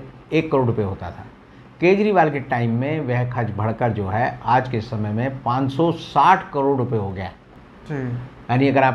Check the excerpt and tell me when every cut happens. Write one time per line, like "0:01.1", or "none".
none